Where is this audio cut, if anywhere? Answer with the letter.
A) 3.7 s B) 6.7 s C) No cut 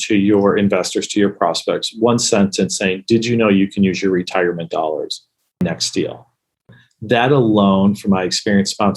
B